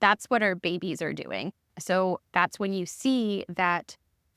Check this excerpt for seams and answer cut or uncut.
uncut